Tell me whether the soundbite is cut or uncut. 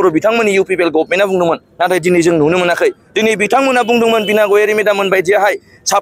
uncut